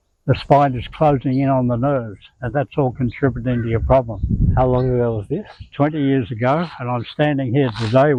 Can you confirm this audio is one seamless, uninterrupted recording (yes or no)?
yes